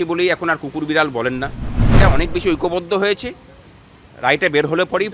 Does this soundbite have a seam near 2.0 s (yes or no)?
yes